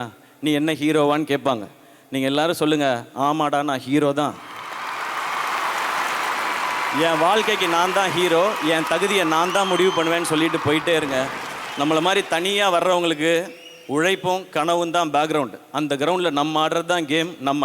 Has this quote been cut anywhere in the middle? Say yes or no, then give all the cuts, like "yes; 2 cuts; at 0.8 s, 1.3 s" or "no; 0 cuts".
no; 0 cuts